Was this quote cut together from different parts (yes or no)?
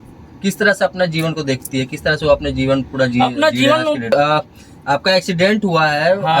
yes